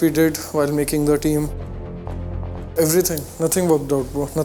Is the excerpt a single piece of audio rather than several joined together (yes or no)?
yes